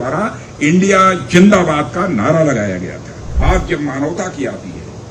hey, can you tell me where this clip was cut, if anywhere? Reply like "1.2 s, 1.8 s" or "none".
3.3 s